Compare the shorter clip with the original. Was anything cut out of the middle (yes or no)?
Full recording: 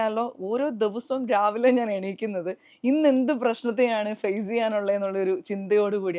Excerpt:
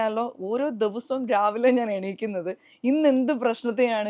no